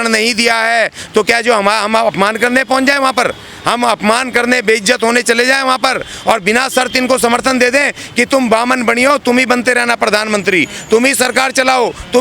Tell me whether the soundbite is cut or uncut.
uncut